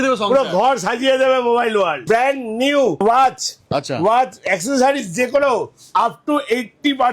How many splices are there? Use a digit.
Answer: 2